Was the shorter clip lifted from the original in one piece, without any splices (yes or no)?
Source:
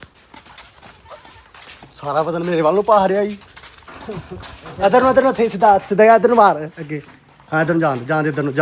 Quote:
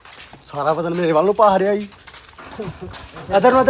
yes